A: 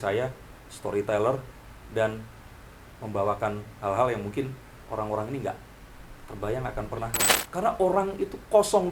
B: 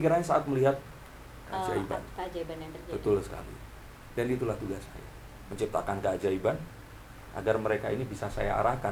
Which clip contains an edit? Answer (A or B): A